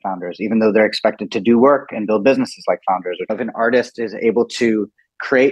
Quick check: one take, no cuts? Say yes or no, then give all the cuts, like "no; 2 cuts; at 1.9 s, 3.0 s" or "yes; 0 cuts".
no; 1 cut; at 3.4 s